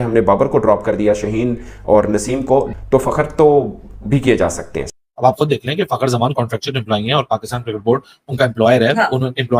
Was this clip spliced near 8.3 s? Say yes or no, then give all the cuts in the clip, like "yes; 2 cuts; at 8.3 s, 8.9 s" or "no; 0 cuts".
no; 1 cut; at 4.9 s